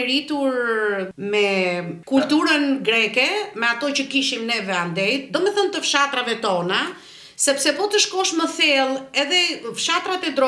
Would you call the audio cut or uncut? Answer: cut